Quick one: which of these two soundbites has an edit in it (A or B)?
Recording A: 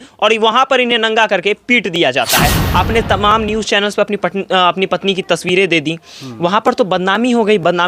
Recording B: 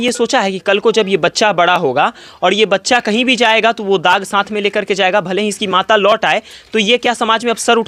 A